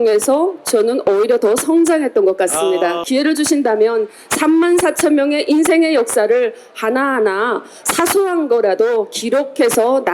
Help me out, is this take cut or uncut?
cut